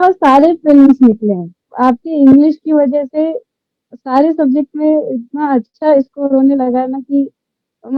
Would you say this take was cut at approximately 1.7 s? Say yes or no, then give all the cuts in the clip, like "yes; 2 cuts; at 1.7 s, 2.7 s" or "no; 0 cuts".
yes; 1 cut; at 1.7 s